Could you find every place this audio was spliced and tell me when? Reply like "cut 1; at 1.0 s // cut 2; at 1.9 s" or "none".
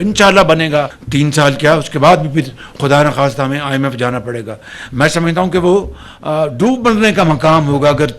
cut 1; at 1.0 s